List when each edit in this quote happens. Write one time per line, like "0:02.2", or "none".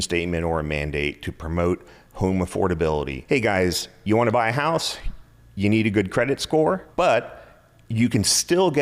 0:03.1
0:06.9